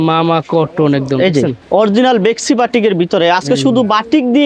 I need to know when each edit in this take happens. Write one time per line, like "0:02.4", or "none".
0:01.6